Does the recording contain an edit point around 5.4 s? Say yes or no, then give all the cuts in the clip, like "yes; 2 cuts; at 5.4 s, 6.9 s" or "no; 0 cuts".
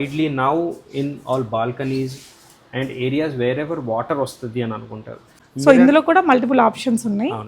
yes; 1 cut; at 5.4 s